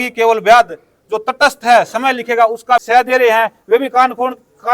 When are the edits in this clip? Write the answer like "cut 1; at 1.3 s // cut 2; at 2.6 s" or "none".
cut 1; at 2.8 s